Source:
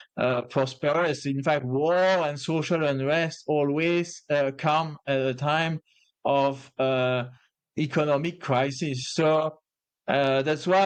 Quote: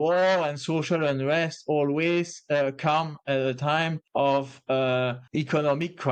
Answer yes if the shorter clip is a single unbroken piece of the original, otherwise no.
no